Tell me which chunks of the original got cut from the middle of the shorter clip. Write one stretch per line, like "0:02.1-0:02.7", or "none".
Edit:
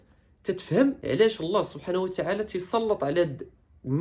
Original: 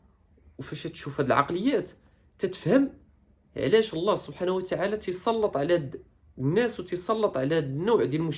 0:03.0-0:03.5